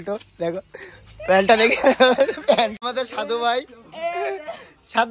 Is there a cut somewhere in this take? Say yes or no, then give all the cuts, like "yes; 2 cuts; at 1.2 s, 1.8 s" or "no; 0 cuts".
yes; 1 cut; at 2.8 s